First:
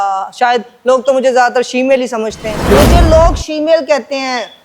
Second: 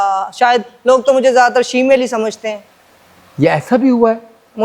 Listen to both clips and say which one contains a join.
first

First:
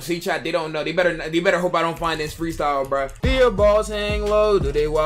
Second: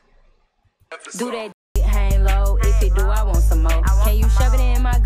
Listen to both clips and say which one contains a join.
first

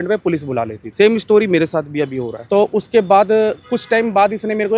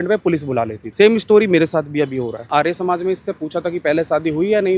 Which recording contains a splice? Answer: second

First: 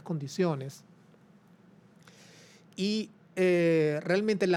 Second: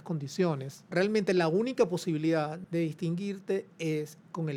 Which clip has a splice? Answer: second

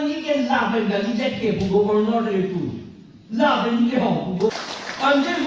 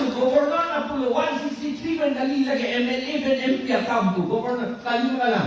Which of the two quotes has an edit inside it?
first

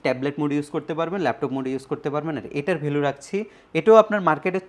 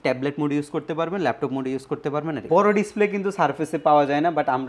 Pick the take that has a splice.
second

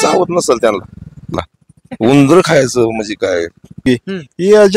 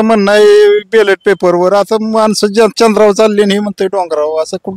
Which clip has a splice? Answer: first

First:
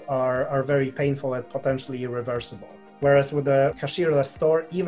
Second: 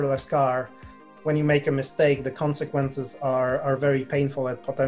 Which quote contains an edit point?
first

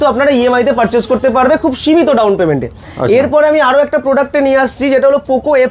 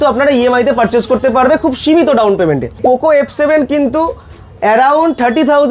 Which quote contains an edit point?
second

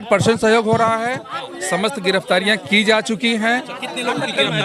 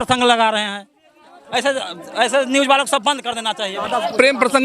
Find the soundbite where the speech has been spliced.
second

